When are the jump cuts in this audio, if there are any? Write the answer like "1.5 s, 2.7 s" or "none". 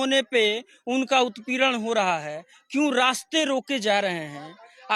none